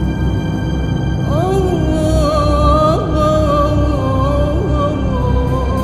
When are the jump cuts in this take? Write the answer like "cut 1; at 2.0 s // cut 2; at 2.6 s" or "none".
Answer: none